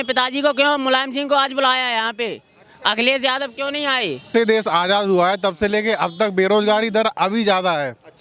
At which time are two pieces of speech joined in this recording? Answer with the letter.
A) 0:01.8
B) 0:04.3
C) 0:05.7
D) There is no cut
B